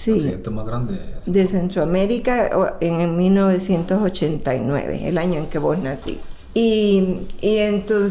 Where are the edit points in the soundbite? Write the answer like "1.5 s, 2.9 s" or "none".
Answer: 6.3 s